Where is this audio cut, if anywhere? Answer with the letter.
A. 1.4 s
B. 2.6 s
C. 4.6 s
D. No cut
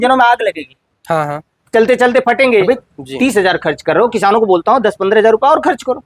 B